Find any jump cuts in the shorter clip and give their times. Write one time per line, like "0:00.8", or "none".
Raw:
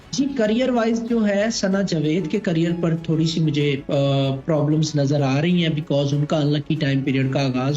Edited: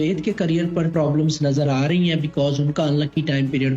0:00.9